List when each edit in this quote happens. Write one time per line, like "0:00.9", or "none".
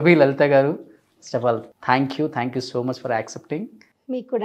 0:01.7